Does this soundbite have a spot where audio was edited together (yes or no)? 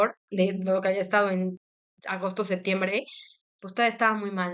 no